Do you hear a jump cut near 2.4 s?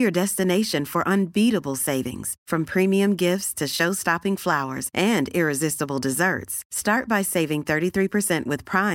no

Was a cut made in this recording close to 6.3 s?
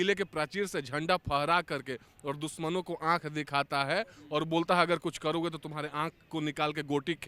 no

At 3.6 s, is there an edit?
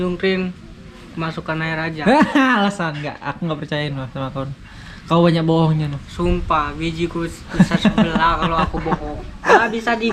no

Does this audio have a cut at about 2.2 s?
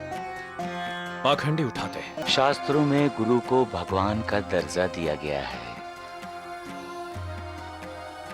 yes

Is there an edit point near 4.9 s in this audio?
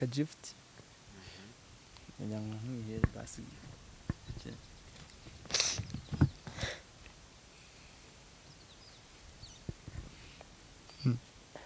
yes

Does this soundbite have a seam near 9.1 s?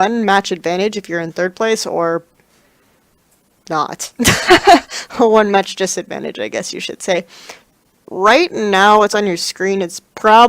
yes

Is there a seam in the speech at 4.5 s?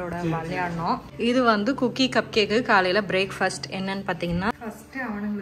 yes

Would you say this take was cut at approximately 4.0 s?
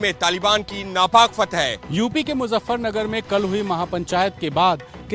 no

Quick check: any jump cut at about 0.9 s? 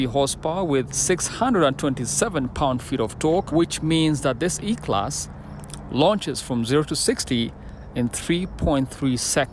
yes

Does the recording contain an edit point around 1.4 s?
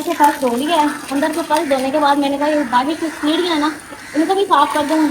no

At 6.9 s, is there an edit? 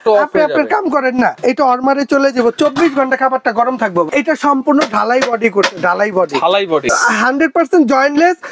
yes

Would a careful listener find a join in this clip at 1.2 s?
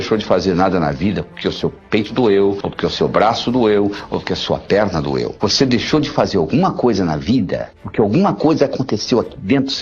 no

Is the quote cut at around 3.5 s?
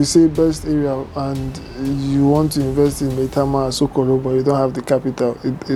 no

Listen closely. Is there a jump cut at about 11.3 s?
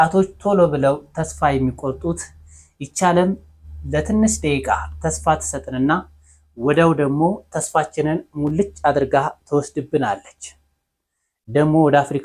no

